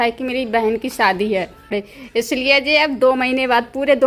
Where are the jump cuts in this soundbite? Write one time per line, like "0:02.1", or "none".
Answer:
0:01.8